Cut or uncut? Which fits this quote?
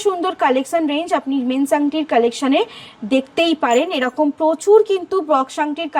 uncut